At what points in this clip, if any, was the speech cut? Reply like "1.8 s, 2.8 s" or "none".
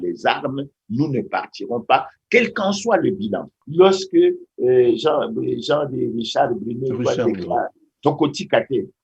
3.5 s